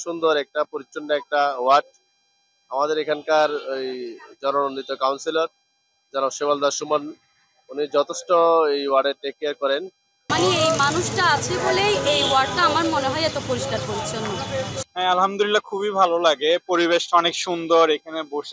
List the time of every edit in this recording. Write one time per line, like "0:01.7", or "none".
0:10.3
0:14.8